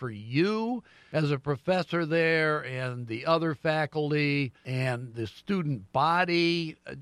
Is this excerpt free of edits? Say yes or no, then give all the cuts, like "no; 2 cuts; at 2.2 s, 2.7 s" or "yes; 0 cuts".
no; 2 cuts; at 0.9 s, 4.6 s